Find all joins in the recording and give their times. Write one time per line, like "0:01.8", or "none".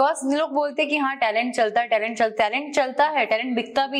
none